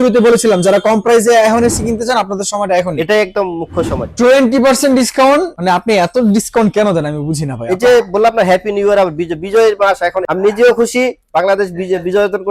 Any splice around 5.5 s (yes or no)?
yes